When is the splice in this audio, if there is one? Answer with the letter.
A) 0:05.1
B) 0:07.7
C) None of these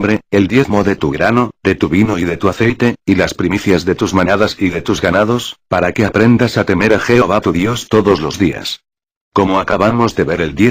B